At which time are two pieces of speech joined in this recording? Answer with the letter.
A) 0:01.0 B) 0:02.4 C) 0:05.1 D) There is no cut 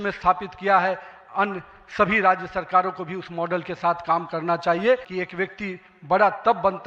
C